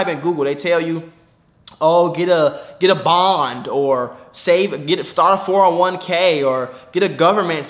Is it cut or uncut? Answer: uncut